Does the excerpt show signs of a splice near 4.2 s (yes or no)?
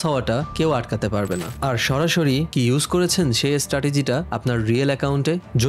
no